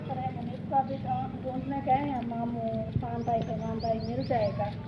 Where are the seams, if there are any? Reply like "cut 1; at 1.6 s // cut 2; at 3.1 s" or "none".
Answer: cut 1; at 2.9 s

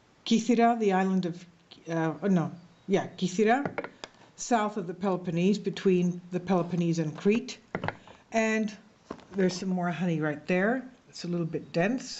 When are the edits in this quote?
cut 1; at 3.2 s

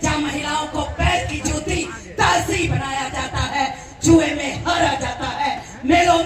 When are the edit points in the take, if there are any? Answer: none

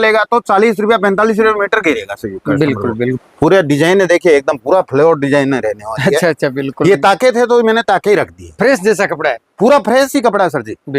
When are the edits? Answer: cut 1; at 3.2 s

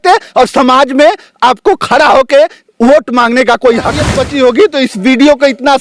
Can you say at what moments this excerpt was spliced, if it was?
cut 1; at 4.1 s

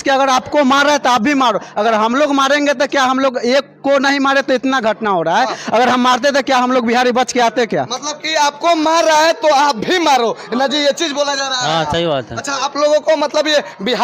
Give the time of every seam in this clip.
none

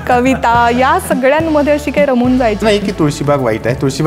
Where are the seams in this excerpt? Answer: cut 1; at 2.6 s

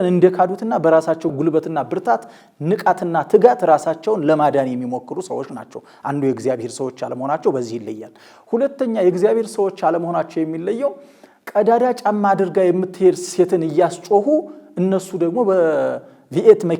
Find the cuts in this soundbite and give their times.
cut 1; at 1.3 s

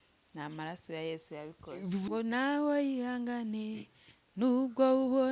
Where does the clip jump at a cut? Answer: cut 1; at 2.1 s

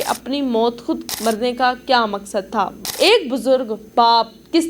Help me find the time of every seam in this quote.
cut 1; at 1.1 s // cut 2; at 2.8 s

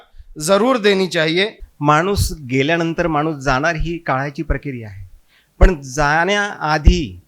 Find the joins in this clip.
cut 1; at 1.6 s

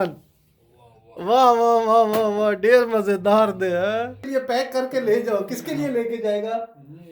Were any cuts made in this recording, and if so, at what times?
cut 1; at 4.2 s

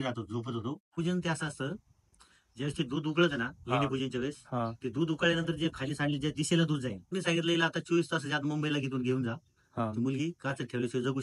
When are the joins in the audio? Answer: cut 1; at 0.9 s // cut 2; at 7.1 s

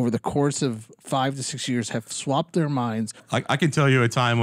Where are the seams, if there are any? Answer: cut 1; at 3.2 s

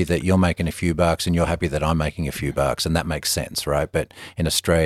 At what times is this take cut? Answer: none

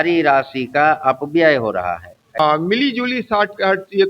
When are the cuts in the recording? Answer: cut 1; at 2.4 s

